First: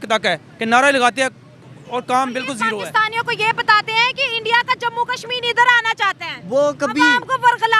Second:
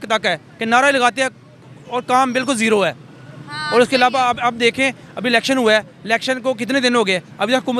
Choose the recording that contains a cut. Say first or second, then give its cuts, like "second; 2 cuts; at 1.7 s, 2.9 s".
first; 1 cut; at 2.7 s